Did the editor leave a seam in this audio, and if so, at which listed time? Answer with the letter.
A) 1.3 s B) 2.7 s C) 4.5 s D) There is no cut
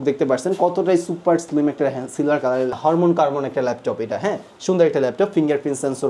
B